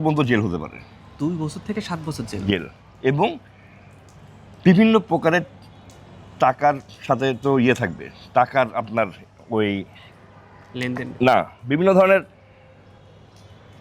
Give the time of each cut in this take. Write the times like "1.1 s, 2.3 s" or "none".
none